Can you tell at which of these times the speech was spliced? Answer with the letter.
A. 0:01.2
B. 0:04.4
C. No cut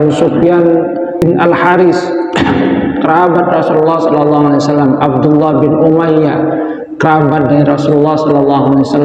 A